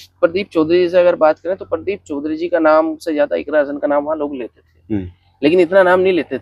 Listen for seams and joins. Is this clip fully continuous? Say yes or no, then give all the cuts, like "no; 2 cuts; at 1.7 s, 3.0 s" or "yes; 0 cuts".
yes; 0 cuts